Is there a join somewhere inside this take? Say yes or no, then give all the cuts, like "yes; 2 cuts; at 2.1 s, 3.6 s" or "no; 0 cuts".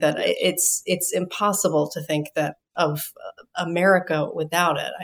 no; 0 cuts